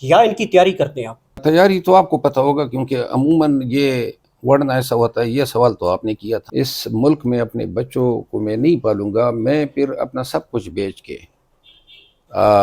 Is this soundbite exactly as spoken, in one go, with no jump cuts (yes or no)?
no